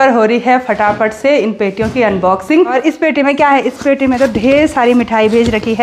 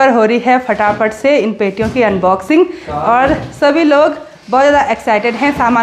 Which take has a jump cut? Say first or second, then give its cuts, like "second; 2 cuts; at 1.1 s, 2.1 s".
first; 1 cut; at 2.7 s